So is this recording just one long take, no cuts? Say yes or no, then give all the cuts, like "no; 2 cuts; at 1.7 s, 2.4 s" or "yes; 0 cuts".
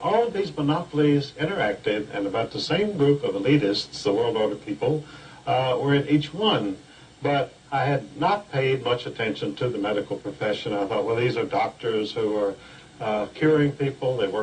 no; 1 cut; at 11.1 s